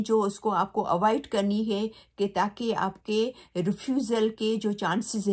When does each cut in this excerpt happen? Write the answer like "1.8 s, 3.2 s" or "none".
none